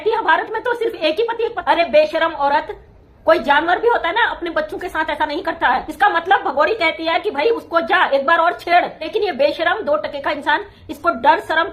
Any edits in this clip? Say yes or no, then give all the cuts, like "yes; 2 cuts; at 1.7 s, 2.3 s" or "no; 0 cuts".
yes; 3 cuts; at 1.6 s, 5.9 s, 9.0 s